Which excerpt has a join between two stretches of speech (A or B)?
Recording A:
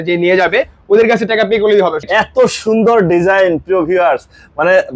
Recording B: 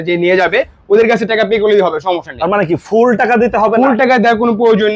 A